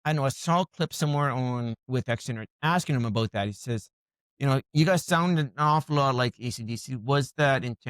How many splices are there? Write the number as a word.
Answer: one